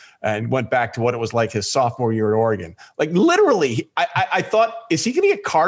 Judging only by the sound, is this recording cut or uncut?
uncut